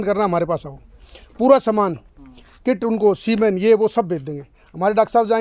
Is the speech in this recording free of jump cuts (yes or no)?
yes